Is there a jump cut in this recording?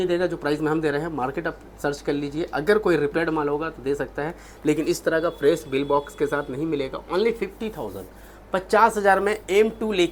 no; 0 cuts

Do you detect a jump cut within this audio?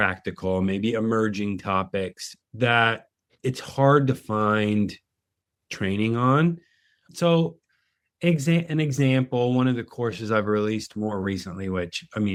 no; 0 cuts

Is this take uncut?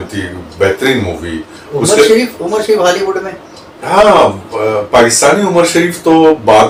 yes; 0 cuts

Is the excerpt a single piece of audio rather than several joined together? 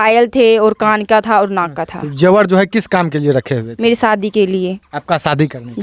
yes; 0 cuts

